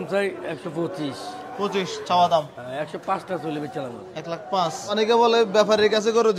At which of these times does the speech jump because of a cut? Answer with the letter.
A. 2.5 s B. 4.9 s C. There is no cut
B